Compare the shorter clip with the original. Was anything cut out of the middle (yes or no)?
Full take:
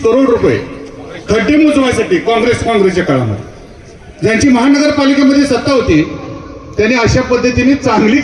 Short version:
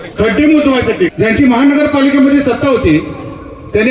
yes